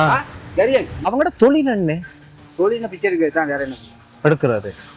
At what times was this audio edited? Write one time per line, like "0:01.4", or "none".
0:01.1